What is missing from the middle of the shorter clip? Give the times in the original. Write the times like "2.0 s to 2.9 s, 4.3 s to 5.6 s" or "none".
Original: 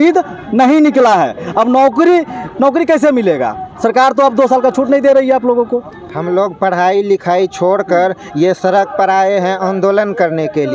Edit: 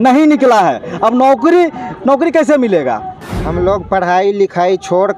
3.7 s to 5.8 s